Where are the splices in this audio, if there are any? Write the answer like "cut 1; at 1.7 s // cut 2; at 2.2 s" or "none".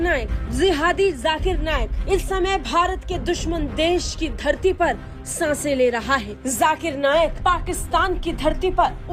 none